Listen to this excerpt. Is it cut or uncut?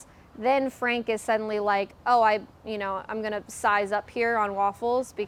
uncut